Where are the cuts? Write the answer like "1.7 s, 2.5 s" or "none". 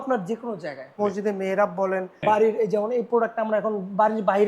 1.0 s, 2.1 s